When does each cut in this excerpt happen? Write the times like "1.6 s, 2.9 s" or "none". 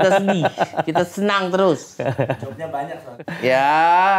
3.1 s

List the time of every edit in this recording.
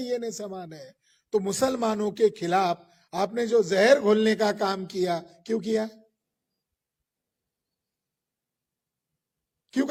none

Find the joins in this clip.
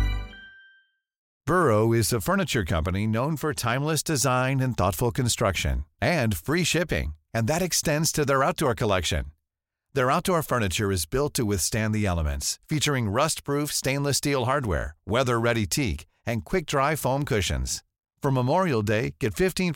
1.3 s

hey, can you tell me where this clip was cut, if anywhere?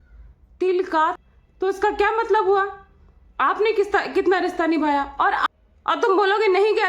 1.2 s, 5.4 s

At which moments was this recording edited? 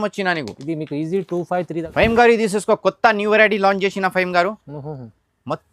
1.9 s

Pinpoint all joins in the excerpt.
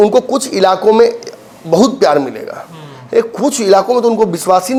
none

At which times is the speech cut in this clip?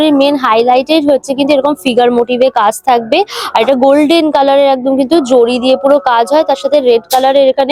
none

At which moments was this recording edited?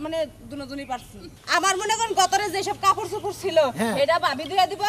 1.3 s

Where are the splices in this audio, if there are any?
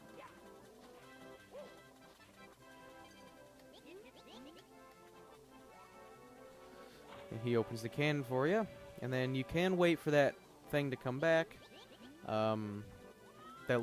none

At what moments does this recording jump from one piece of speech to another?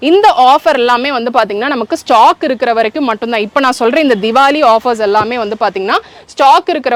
none

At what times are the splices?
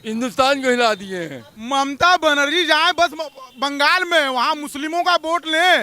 1.6 s

